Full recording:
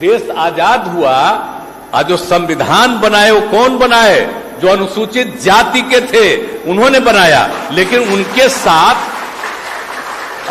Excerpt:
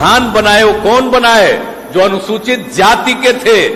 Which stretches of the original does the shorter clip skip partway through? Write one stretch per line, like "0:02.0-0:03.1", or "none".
none